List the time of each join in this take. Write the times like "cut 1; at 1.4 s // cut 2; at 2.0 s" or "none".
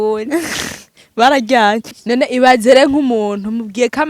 cut 1; at 1.9 s